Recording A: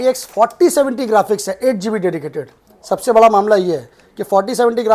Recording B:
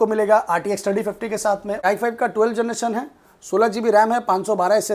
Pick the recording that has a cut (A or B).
B